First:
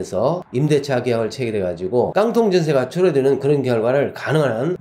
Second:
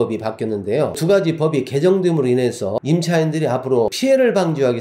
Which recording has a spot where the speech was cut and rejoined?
second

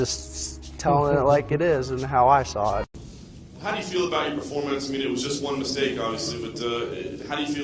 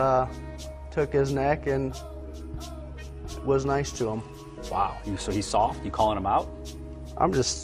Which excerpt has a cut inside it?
second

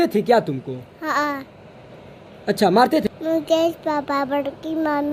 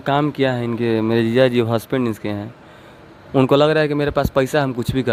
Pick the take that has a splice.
first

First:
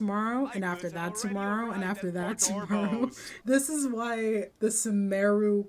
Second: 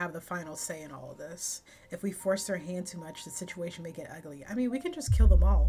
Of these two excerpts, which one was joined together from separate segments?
first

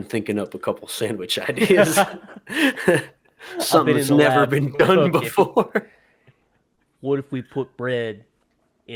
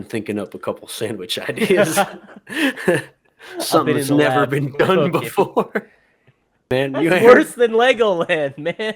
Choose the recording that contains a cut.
second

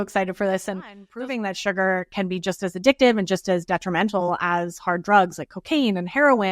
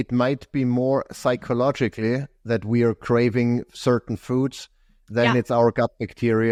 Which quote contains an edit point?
first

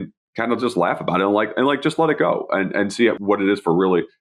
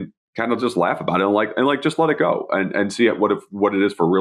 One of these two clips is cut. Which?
first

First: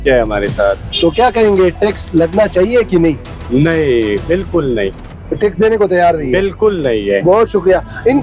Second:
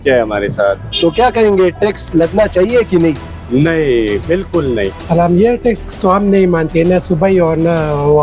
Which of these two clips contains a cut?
second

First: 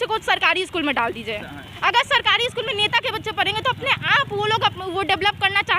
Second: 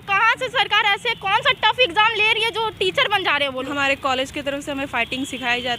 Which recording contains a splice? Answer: second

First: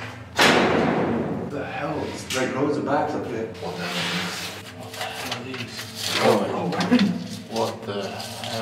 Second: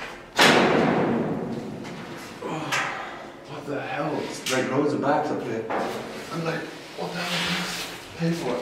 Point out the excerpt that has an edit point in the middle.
first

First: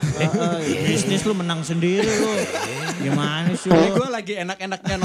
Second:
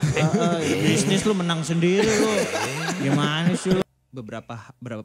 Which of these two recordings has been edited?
second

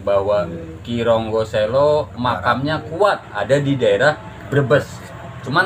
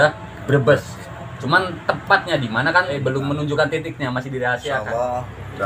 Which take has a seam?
second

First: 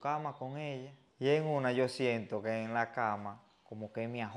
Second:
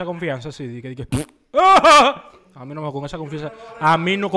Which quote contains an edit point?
first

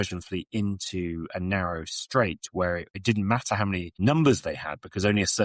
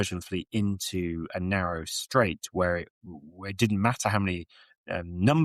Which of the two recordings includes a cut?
first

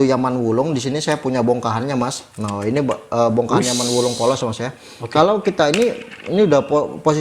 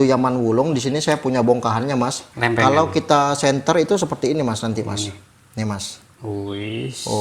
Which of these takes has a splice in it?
second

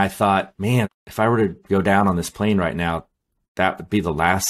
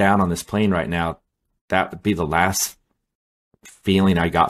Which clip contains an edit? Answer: first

